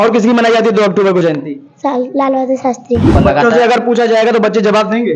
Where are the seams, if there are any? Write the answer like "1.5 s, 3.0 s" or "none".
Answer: 3.1 s